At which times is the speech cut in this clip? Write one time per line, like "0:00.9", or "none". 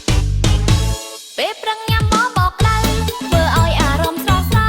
0:01.1